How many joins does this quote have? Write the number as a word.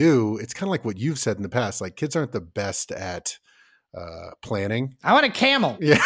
zero